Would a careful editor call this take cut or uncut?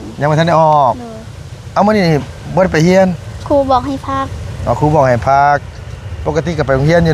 uncut